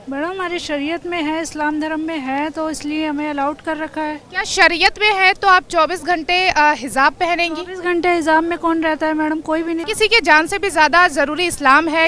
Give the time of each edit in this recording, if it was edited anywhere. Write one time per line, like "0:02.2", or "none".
0:09.9